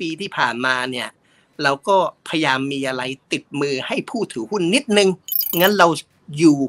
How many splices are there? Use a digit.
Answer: 1